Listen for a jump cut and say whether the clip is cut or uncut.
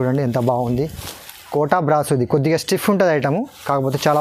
uncut